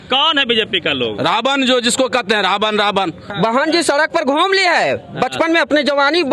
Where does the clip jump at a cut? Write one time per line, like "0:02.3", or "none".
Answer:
0:03.2